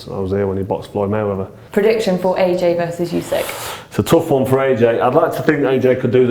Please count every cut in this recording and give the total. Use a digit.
1